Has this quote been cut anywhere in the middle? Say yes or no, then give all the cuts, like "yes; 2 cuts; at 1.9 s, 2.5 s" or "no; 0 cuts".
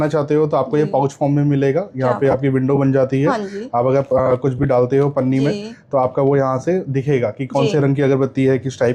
no; 0 cuts